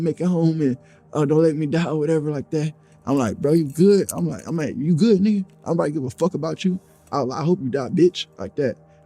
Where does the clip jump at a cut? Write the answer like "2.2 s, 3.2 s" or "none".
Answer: none